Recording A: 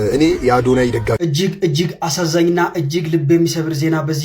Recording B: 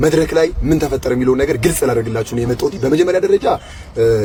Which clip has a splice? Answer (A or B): A